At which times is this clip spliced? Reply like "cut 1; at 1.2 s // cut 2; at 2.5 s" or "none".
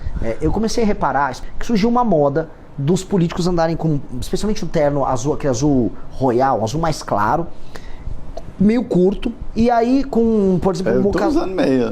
cut 1; at 1.4 s